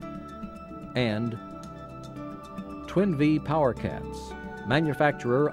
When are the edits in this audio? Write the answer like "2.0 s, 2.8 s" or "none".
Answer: 0.9 s